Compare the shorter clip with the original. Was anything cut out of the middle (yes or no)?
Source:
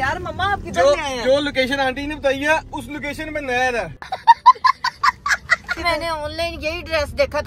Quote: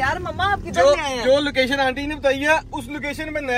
no